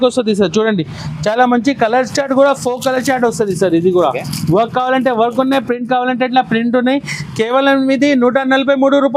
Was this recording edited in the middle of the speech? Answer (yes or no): no